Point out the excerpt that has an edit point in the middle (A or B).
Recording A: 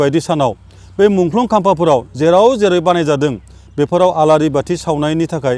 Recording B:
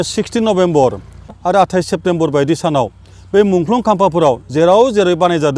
B